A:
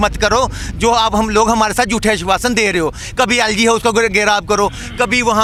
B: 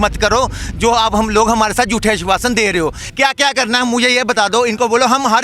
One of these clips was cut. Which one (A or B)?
B